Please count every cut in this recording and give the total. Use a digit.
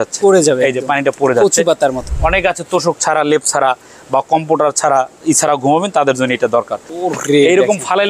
2